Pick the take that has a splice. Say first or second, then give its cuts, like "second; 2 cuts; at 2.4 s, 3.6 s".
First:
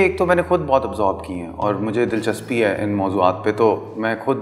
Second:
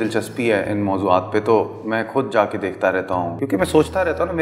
second; 1 cut; at 3.3 s